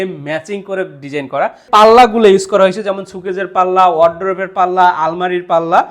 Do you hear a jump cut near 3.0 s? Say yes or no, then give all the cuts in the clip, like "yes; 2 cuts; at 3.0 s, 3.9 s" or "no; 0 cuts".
no; 1 cut; at 1.6 s